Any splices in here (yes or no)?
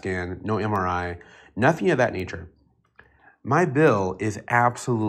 yes